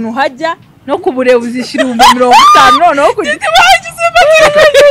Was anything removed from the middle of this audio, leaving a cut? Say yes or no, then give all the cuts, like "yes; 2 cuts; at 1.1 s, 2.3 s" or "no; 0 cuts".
no; 0 cuts